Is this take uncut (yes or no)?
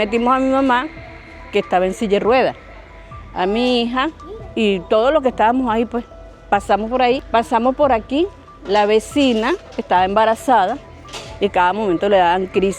no